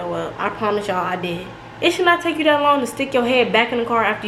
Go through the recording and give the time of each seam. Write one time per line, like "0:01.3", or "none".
none